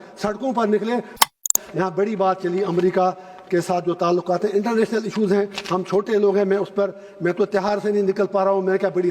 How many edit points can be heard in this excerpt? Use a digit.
1